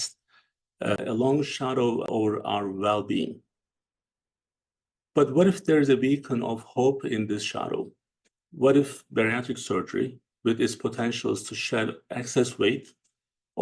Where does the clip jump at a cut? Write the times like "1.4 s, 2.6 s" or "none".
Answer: 1.0 s, 2.1 s